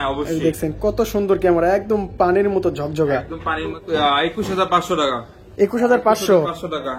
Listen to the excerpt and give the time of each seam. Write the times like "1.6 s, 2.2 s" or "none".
3.8 s